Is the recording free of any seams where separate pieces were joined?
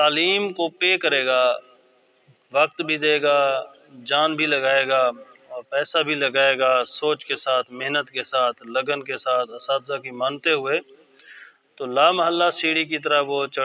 yes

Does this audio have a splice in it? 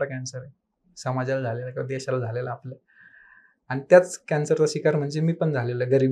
no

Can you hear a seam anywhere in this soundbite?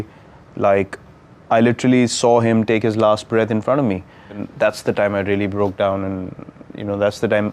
yes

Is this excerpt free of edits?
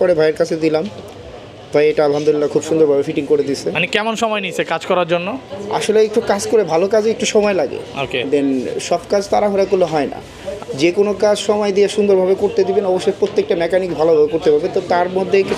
yes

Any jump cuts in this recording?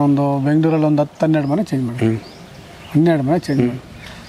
no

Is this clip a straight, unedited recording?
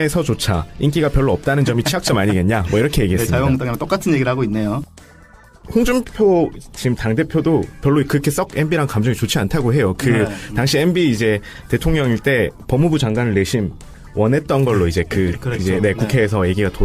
no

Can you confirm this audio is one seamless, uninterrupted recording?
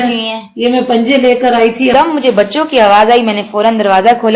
no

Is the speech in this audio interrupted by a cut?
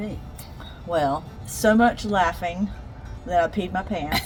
no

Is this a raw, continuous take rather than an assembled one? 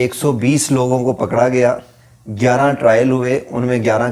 yes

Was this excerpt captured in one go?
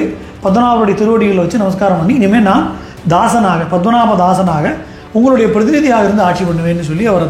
yes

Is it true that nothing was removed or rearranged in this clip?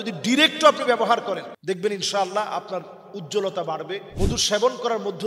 no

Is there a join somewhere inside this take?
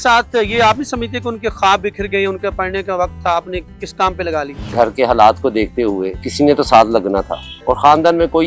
yes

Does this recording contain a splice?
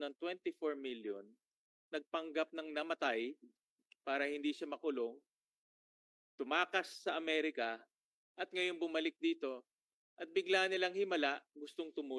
no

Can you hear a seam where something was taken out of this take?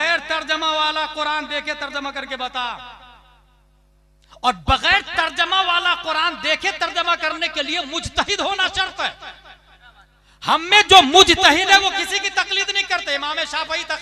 no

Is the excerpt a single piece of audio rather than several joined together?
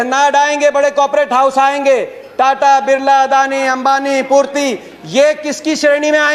yes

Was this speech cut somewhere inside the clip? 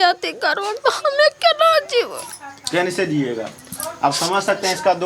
no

